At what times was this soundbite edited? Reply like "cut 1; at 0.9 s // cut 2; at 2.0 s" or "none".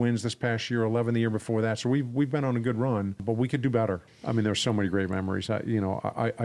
cut 1; at 3.2 s // cut 2; at 4.1 s